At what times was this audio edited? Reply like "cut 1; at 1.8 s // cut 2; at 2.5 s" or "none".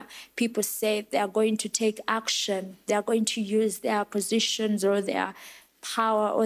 none